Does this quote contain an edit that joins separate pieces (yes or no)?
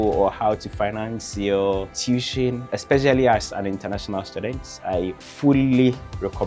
yes